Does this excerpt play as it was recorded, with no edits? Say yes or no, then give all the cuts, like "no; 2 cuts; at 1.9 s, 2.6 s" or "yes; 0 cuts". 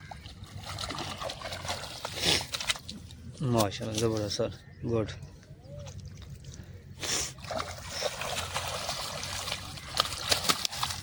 yes; 0 cuts